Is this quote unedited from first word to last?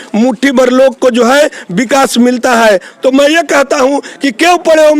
no; 1 cut; at 2.9 s

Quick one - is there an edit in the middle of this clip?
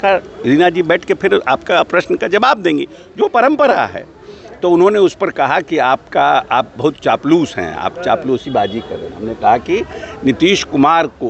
no; 0 cuts

